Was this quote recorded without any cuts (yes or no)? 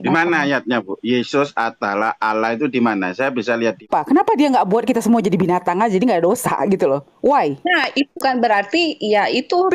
no